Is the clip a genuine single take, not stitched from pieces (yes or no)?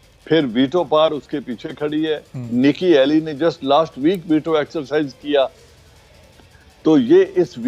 yes